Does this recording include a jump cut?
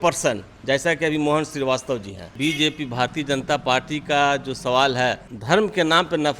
yes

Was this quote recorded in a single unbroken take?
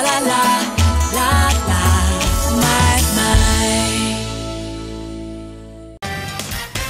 no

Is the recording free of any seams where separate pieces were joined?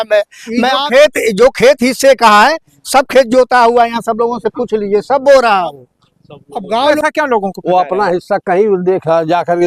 no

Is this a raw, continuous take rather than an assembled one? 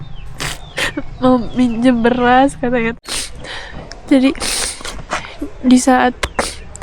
no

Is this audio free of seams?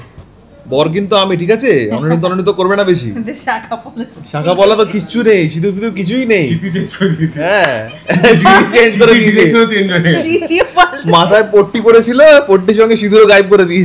yes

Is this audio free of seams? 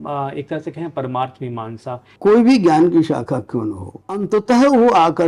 no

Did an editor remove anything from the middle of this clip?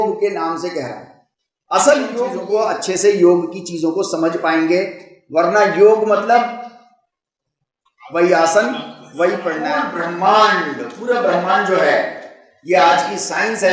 yes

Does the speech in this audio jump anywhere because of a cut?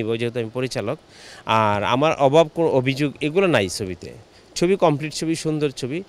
no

